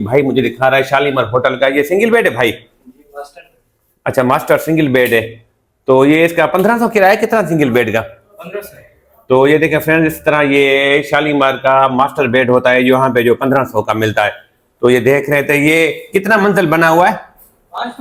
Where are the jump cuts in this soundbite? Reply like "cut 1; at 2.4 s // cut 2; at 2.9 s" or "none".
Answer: none